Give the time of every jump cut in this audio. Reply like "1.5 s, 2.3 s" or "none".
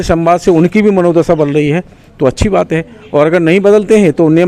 none